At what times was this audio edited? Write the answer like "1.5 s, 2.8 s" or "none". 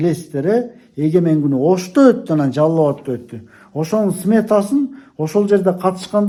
none